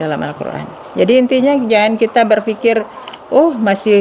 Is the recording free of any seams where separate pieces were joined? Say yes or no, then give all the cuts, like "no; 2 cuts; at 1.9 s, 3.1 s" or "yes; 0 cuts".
yes; 0 cuts